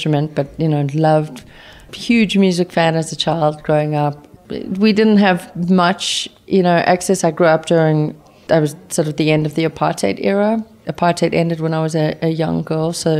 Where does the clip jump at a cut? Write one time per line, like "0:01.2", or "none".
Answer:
0:01.9
0:04.3
0:08.1